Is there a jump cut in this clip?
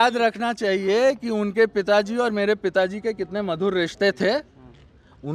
no; 0 cuts

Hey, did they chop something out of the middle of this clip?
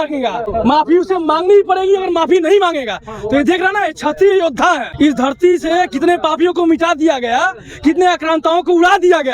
no; 0 cuts

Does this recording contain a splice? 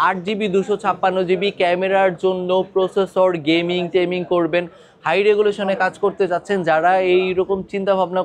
no; 0 cuts

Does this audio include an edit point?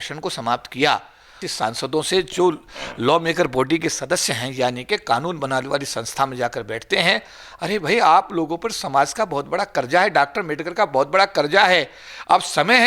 yes; 1 cut; at 1.4 s

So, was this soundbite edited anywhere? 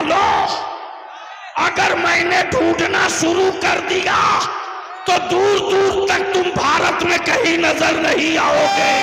no; 0 cuts

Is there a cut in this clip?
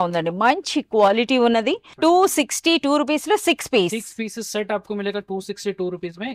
yes; 1 cut; at 1.9 s

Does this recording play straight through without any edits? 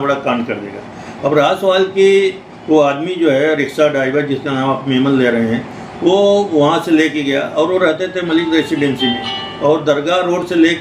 yes; 0 cuts

